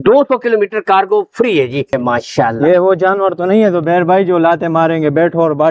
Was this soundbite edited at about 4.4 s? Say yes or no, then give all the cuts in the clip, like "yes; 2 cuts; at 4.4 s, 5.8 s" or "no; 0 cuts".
no; 1 cut; at 2.0 s